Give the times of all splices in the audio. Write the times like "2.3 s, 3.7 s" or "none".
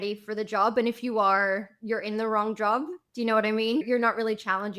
3.8 s